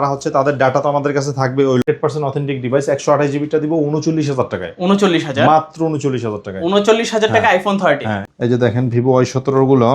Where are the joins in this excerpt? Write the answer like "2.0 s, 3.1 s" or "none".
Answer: 1.8 s, 8.2 s